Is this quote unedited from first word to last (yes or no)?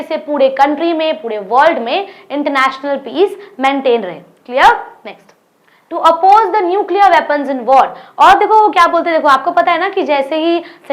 yes